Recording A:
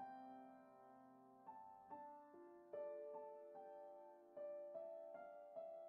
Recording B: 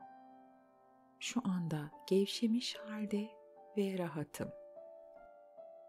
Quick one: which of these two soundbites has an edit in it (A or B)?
B